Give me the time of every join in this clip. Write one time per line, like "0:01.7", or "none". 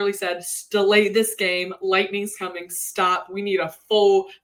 none